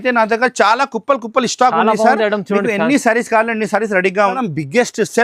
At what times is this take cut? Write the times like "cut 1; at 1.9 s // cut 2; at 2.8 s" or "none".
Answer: cut 1; at 4.1 s